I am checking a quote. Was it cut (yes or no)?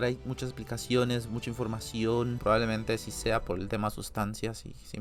yes